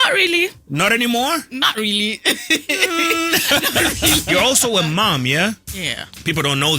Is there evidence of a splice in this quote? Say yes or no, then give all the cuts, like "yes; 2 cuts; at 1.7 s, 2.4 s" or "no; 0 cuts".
yes; 1 cut; at 4.2 s